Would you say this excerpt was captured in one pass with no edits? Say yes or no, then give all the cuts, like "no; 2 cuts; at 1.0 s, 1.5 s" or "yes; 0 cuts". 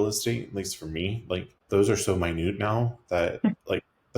no; 1 cut; at 1.5 s